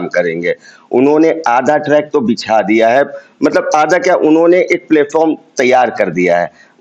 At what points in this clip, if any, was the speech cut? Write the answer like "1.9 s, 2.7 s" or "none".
none